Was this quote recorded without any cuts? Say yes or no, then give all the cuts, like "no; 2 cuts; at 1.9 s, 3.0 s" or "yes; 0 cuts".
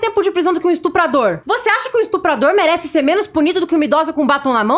no; 1 cut; at 1.4 s